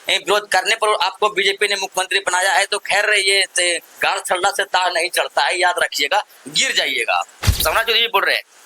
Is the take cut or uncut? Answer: cut